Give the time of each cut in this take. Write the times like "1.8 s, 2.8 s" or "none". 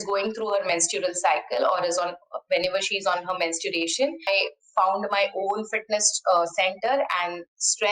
4.3 s